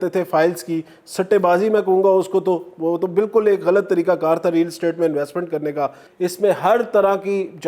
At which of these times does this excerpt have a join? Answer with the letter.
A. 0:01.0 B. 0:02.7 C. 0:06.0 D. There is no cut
C